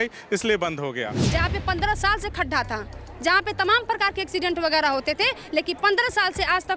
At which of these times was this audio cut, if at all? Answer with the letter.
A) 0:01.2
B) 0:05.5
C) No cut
A